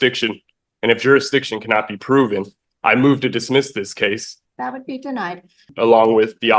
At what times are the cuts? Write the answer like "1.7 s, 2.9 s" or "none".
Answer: 4.3 s, 5.7 s